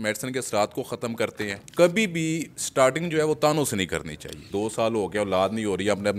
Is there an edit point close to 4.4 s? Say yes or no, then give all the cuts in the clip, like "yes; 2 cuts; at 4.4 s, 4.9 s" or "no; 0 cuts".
yes; 2 cuts; at 1.5 s, 4.4 s